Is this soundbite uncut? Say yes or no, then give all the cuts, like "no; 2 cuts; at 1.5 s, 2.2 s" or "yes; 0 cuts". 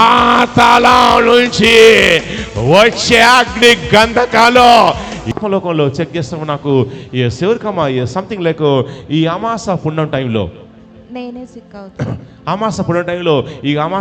no; 1 cut; at 5.2 s